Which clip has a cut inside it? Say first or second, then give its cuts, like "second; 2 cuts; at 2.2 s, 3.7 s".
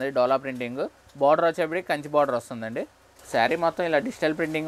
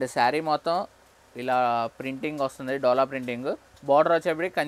first; 1 cut; at 3.2 s